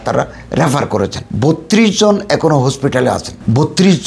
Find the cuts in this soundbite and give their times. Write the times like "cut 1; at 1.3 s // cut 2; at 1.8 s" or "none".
cut 1; at 1.3 s